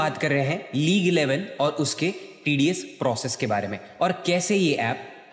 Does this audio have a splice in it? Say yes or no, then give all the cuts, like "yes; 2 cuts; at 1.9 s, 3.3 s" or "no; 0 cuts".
no; 0 cuts